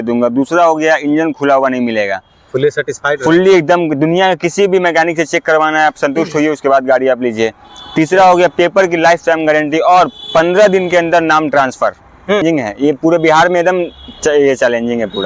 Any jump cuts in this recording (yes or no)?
no